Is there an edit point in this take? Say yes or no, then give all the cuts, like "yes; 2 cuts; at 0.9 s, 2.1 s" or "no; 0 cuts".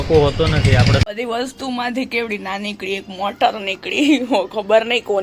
yes; 1 cut; at 1.0 s